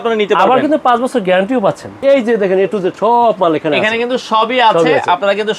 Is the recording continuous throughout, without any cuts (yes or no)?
no